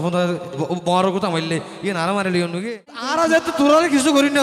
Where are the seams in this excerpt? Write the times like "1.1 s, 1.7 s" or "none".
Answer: 3.0 s